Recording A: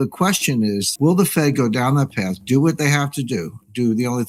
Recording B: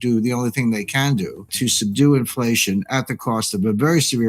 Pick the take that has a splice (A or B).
B